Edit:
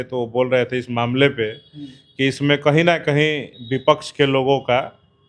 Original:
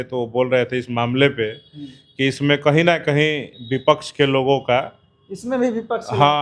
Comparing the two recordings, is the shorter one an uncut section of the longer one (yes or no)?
yes